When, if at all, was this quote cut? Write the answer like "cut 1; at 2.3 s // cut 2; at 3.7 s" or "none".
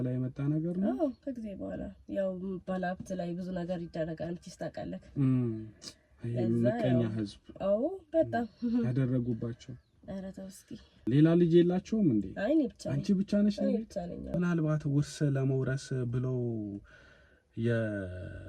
cut 1; at 11.0 s // cut 2; at 14.3 s